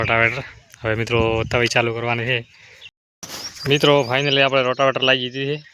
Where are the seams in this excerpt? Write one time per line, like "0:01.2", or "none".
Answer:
0:03.0